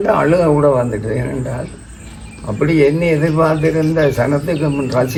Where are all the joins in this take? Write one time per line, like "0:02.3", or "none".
none